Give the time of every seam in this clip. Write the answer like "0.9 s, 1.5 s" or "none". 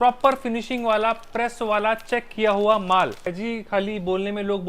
3.4 s